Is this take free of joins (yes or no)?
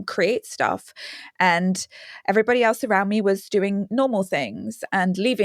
yes